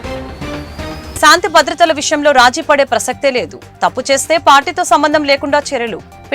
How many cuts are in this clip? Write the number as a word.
one